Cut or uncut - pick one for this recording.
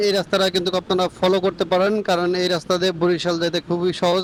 uncut